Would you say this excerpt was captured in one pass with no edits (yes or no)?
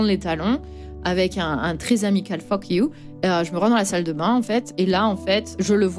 no